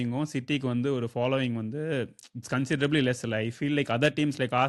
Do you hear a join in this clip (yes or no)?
no